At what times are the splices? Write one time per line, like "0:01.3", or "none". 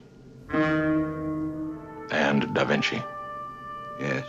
0:01.8